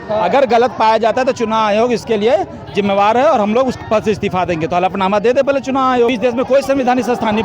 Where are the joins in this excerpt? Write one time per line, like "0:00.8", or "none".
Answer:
0:06.1